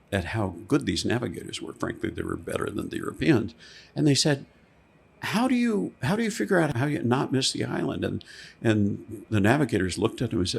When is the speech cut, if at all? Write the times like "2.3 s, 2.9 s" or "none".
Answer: 6.7 s, 9.2 s

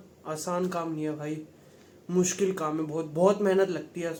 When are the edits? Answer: none

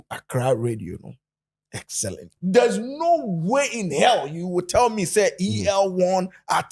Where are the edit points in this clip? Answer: 2.3 s

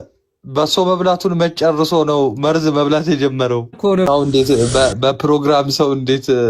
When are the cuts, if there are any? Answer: 4.1 s

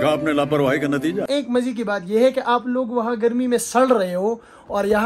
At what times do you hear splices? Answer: 1.2 s

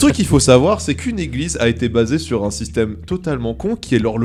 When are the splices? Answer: none

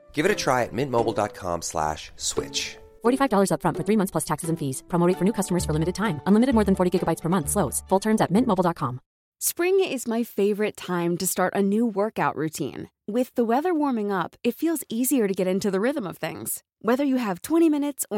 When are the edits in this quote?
9.2 s

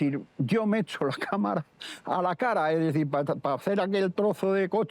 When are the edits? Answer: none

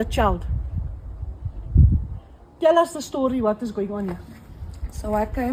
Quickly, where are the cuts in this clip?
none

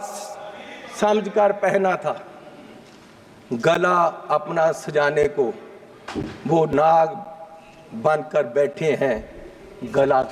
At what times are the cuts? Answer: none

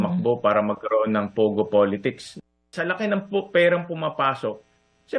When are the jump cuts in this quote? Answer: none

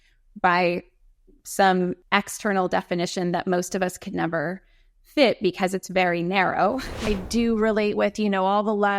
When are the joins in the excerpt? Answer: 2.0 s, 7.1 s

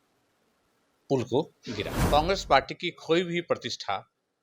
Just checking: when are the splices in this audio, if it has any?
1.9 s

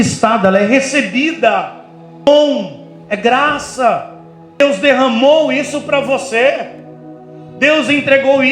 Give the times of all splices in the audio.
2.3 s, 4.6 s

